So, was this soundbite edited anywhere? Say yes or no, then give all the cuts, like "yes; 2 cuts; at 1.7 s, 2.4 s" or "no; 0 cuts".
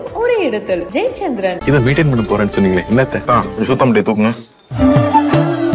no; 0 cuts